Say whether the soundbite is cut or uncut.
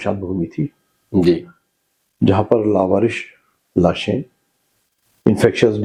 uncut